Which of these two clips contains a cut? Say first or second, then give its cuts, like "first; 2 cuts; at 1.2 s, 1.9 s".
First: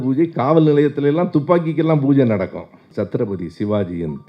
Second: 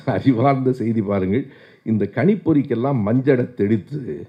first; 1 cut; at 2.9 s